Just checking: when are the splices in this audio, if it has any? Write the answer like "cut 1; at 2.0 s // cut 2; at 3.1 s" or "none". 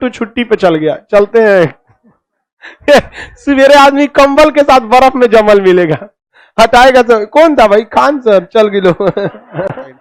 none